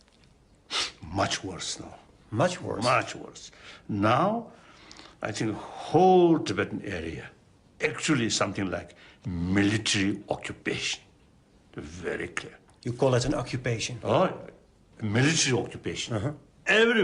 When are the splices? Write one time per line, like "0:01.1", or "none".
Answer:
0:15.7